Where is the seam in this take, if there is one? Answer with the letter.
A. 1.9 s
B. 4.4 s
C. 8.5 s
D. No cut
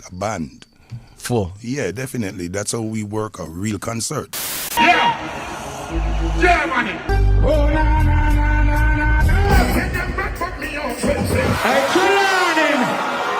B